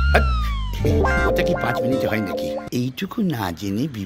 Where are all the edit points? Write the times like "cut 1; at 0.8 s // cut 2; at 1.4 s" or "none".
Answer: cut 1; at 2.6 s